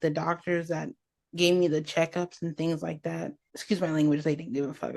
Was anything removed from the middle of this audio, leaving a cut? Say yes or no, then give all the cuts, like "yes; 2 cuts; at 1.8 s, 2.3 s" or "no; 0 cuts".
yes; 1 cut; at 3.6 s